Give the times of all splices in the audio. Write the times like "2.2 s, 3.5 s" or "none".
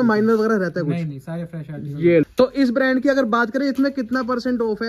2.2 s